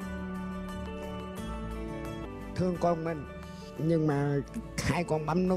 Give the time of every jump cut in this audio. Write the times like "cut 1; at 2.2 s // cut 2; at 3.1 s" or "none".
cut 1; at 2.3 s